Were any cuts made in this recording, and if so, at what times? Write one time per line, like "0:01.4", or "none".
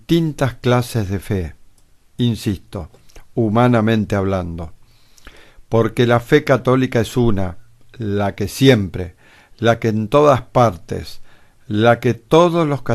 0:00.9